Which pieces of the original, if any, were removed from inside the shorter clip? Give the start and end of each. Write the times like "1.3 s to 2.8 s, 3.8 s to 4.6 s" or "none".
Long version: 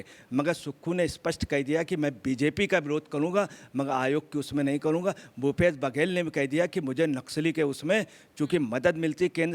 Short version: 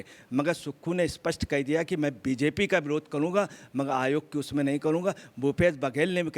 none